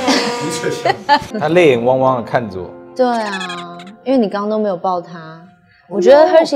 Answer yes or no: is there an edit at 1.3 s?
yes